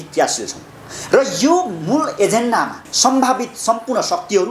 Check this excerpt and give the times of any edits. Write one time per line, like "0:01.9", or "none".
0:02.9